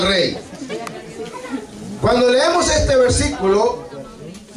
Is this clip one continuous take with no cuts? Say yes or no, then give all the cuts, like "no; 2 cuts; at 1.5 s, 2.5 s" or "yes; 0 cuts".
no; 1 cut; at 3.3 s